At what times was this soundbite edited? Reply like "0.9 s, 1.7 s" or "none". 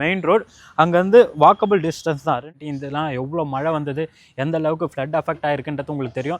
2.6 s